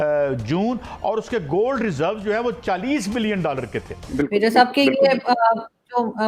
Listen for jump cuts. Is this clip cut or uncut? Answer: cut